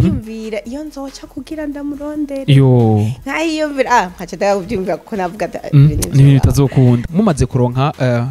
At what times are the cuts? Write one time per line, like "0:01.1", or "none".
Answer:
0:07.1